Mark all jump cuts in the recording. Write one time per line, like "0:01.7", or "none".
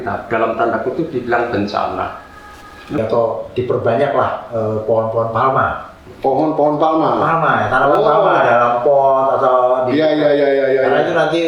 0:03.0